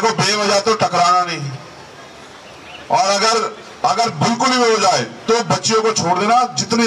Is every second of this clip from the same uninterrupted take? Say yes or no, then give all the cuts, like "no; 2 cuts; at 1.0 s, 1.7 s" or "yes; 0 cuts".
yes; 0 cuts